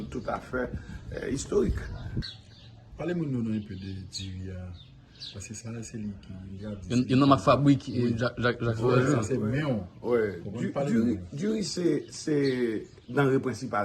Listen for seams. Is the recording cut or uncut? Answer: cut